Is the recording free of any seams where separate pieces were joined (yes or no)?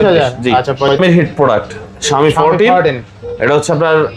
no